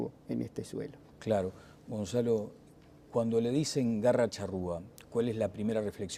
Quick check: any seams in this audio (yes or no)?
yes